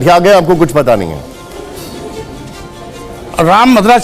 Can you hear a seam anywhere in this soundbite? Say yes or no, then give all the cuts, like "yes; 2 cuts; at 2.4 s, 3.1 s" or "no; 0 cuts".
yes; 1 cut; at 2.4 s